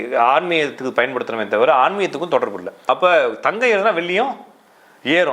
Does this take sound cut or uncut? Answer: cut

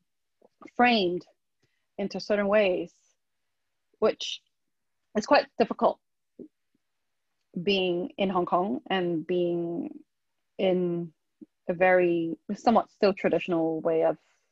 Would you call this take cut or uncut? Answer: uncut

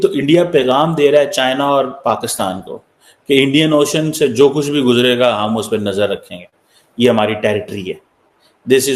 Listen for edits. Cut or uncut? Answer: uncut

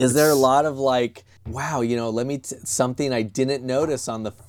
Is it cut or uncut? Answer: uncut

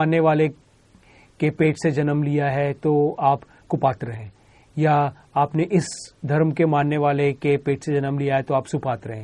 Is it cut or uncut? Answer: uncut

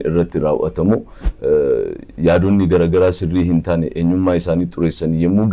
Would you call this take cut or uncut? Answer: uncut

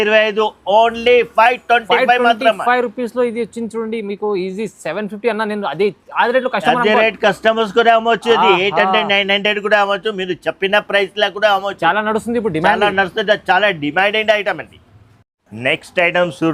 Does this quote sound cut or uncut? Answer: uncut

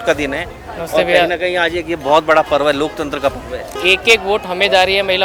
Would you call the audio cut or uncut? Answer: cut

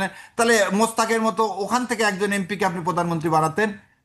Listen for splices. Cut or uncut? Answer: uncut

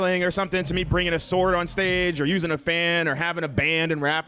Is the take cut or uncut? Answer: uncut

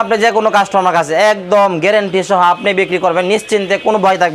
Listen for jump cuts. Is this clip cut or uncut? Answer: uncut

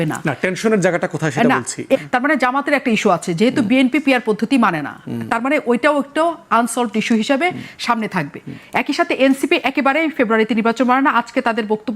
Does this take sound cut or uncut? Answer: cut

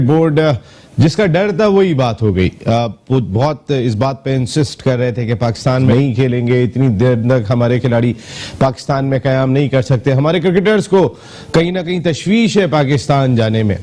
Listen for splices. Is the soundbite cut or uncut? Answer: uncut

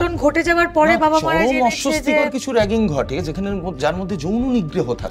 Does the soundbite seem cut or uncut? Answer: uncut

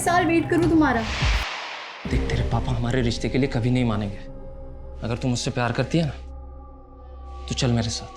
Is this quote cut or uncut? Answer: cut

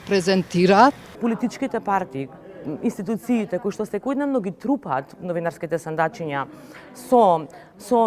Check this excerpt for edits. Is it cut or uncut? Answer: cut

